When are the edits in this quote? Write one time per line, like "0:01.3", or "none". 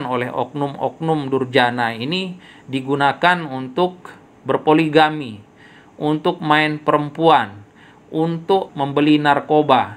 0:08.7